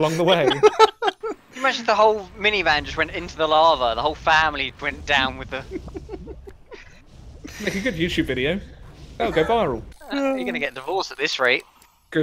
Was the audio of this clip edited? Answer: yes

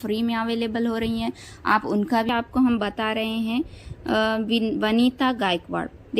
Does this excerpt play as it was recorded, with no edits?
no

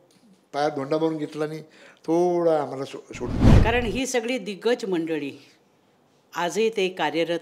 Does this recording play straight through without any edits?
no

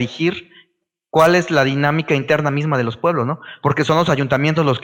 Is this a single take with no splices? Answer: yes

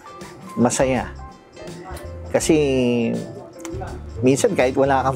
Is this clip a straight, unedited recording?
yes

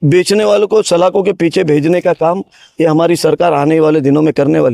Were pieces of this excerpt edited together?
no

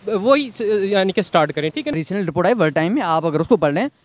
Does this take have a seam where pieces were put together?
yes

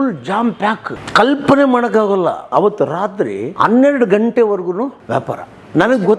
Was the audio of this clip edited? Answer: yes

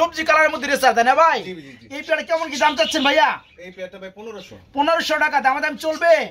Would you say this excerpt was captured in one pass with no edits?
yes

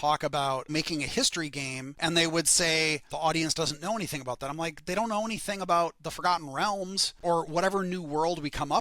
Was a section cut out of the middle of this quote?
yes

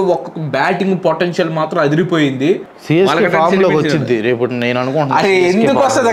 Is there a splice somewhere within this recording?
yes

